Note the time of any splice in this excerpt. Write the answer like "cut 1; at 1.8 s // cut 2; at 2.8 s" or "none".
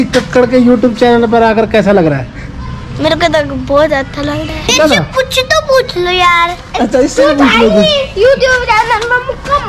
cut 1; at 4.7 s // cut 2; at 8.1 s